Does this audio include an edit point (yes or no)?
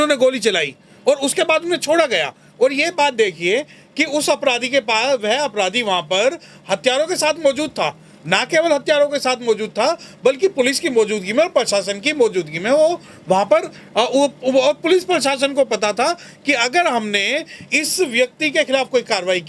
no